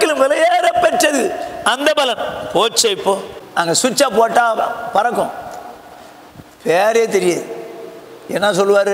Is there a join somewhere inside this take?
yes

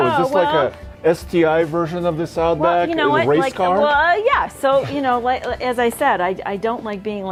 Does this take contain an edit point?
no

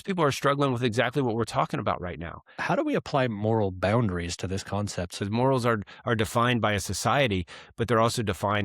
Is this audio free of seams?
no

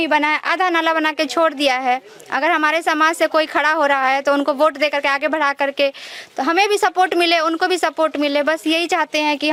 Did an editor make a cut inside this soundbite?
no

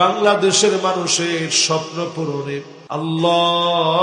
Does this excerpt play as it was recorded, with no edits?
no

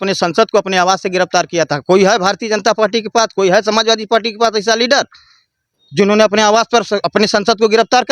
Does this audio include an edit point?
no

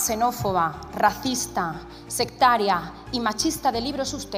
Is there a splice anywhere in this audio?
no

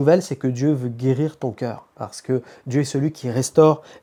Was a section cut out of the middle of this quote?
no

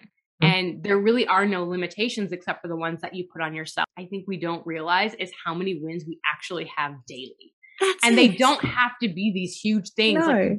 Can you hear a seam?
yes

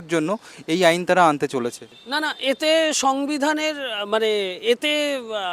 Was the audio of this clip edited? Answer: no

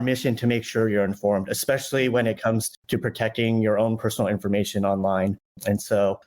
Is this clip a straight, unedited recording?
no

